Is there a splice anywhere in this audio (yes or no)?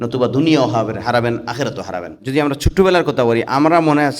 yes